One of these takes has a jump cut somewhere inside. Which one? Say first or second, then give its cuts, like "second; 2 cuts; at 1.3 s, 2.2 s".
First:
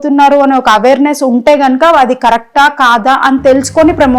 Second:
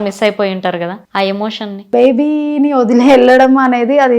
second; 2 cuts; at 1.0 s, 1.8 s